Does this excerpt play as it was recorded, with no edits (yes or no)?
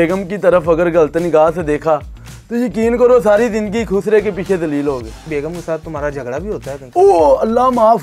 yes